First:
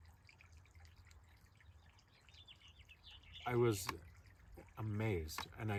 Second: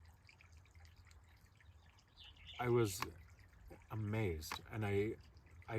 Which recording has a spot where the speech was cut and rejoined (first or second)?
second